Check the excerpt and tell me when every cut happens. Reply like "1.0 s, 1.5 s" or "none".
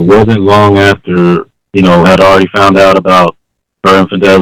1.6 s